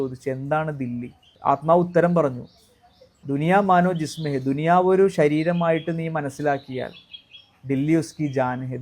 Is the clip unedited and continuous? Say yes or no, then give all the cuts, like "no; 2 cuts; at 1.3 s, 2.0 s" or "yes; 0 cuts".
no; 2 cuts; at 1.3 s, 3.2 s